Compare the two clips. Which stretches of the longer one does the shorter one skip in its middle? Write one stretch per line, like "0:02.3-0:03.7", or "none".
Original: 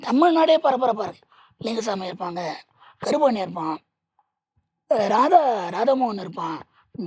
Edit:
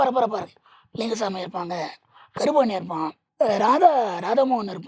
0:03.9-0:04.7